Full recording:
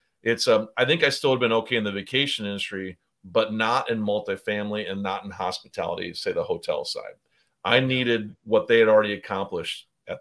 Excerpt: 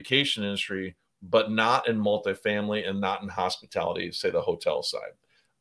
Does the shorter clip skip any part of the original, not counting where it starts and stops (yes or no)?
no